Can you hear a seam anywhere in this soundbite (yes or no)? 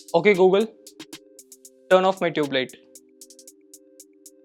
no